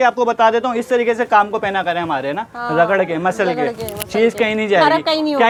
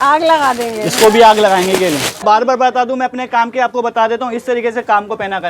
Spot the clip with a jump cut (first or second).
second